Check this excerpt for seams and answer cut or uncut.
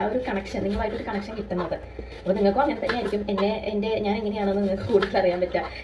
uncut